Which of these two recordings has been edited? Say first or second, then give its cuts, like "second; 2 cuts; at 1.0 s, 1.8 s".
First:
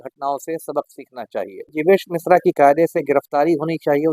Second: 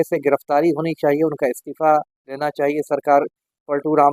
first; 1 cut; at 1.7 s